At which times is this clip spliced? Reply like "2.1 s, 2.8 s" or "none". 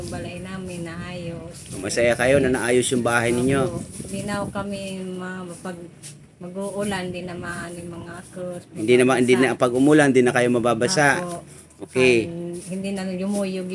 none